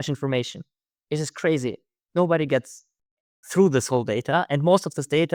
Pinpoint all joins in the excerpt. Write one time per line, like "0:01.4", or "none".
none